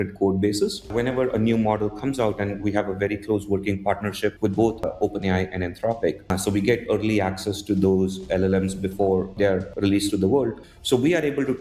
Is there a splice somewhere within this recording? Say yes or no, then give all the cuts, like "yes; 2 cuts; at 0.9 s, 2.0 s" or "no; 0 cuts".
yes; 5 cuts; at 0.9 s, 4.7 s, 6.3 s, 9.5 s, 10.7 s